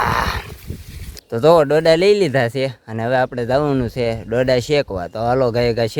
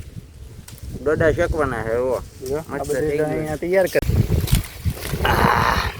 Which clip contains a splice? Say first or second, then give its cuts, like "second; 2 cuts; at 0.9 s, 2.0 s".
second; 1 cut; at 4.0 s